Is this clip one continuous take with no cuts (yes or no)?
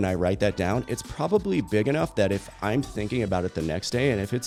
yes